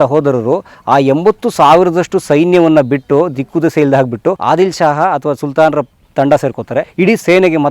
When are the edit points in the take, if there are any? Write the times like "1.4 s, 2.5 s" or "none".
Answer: 4.4 s, 6.9 s

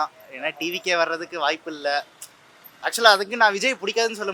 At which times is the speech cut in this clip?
none

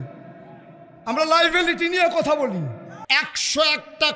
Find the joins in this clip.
2.9 s

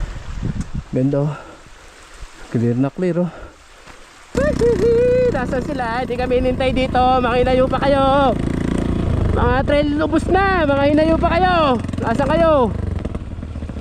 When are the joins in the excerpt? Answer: 4.3 s

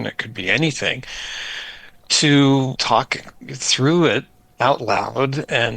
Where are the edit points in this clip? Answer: 2.8 s

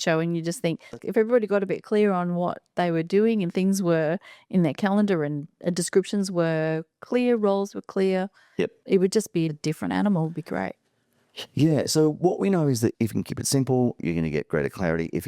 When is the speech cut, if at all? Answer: 1.0 s, 9.6 s, 12.9 s

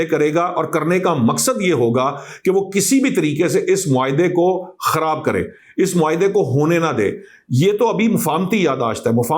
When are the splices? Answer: none

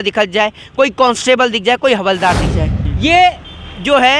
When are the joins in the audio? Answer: 2.8 s

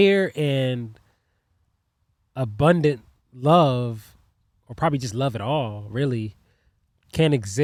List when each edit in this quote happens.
none

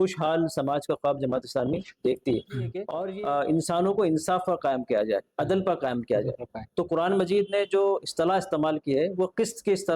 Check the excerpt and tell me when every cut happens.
3.0 s

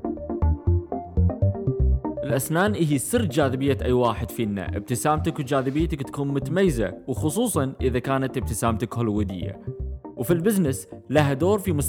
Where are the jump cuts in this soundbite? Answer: 2.3 s

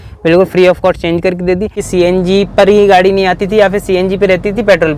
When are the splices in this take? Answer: 1.8 s

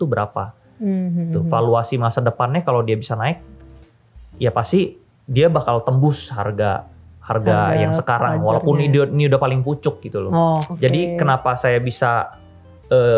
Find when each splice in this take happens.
10.7 s

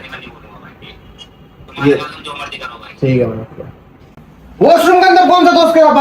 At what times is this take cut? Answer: 4.0 s

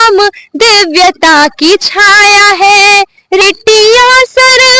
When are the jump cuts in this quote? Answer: 3.4 s

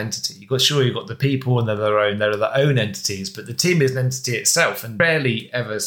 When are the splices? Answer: 4.9 s

